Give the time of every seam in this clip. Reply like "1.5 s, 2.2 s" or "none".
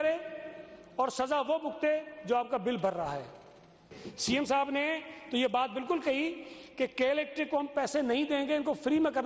4.0 s